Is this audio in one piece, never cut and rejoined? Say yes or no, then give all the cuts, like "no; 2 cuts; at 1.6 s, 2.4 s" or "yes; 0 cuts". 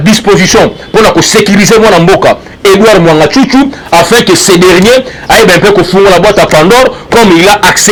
yes; 0 cuts